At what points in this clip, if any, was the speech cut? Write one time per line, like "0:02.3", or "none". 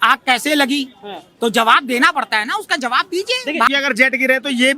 0:03.7